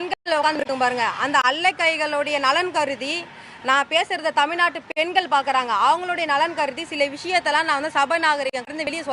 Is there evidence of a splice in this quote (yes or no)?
no